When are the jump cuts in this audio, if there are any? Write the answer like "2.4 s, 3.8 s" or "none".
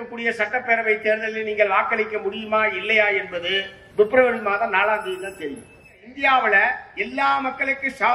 3.7 s, 6.1 s